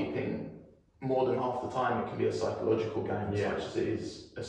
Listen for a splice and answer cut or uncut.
uncut